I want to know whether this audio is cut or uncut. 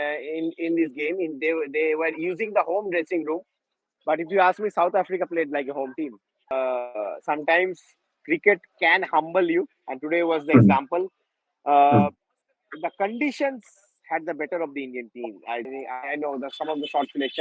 cut